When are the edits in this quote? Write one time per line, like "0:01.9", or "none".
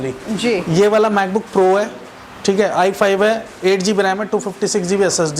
none